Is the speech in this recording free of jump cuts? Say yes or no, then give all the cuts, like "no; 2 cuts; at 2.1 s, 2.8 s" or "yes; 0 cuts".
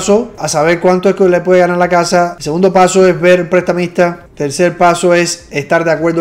yes; 0 cuts